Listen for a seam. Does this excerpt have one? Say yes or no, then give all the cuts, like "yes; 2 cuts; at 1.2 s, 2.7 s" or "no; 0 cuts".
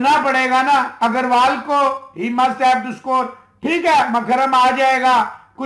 no; 0 cuts